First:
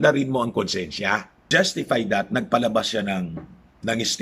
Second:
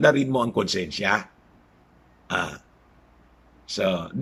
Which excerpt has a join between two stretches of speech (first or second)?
first